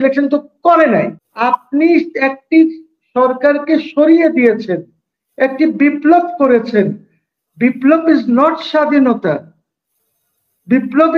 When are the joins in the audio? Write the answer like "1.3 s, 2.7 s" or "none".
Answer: 1.2 s

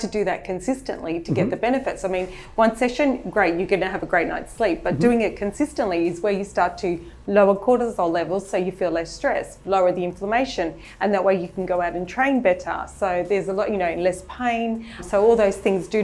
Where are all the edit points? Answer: 15.0 s

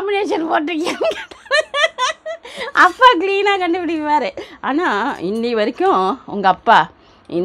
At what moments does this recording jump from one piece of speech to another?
none

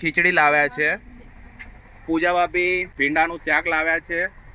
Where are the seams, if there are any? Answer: 2.9 s

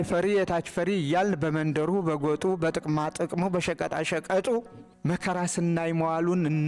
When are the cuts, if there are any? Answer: 4.8 s

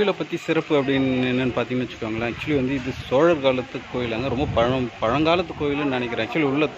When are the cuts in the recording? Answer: none

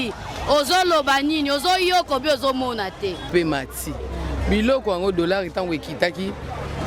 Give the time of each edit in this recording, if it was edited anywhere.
3.3 s

